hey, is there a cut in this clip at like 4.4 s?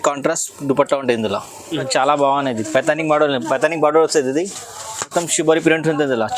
no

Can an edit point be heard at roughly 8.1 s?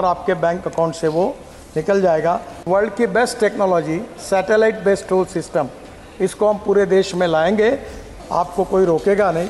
yes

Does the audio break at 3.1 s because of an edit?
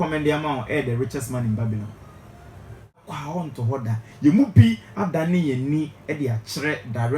yes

